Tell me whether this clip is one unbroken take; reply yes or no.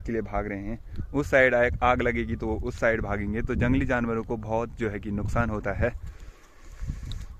yes